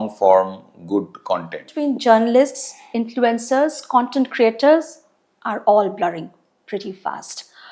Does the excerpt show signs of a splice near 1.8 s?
yes; 1 cut; at 1.8 s

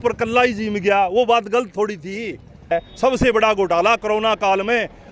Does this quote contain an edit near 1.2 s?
no; 1 cut; at 2.7 s

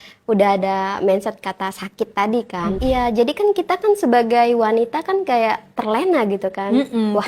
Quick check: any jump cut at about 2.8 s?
yes; 1 cut; at 2.8 s

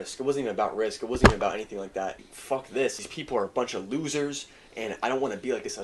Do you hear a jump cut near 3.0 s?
yes; 2 cuts; at 2.3 s, 3.0 s

